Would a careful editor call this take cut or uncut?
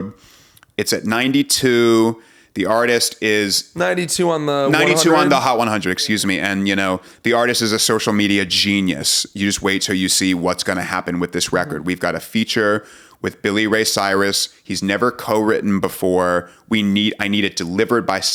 uncut